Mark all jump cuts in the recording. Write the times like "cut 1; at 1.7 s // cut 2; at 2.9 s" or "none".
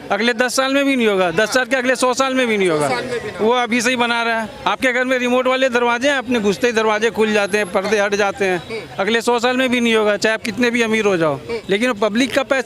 cut 1; at 4.5 s // cut 2; at 11.5 s